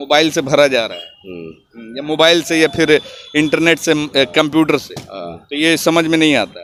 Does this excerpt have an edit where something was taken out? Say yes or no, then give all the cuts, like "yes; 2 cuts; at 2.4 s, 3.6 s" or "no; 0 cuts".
no; 0 cuts